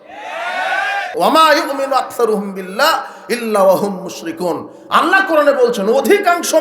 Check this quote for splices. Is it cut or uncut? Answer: cut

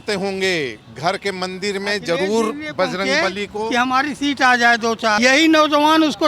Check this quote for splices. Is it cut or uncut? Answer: cut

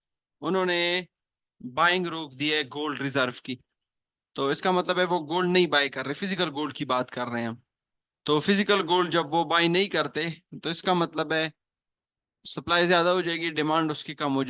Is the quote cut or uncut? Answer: uncut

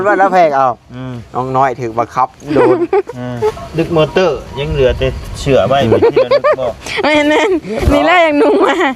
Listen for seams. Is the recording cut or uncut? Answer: cut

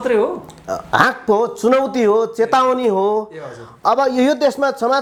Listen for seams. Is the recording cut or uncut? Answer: uncut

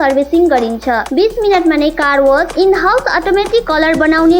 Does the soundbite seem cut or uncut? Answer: uncut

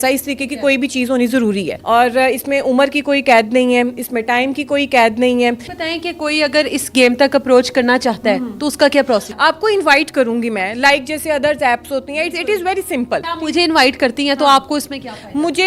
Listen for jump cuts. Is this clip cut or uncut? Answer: cut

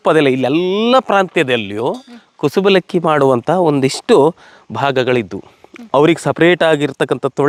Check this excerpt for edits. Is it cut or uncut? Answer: uncut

